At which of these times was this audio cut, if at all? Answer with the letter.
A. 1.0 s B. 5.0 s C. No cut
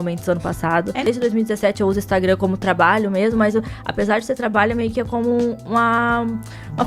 A